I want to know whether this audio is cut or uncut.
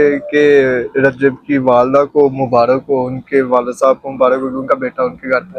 uncut